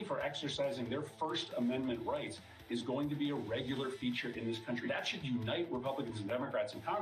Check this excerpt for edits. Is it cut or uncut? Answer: uncut